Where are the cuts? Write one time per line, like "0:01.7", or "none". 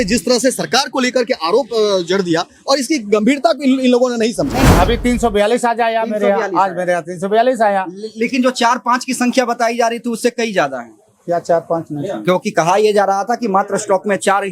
0:04.7